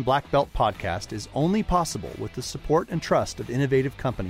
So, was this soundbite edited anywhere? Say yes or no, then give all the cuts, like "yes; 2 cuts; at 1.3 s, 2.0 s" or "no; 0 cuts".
no; 0 cuts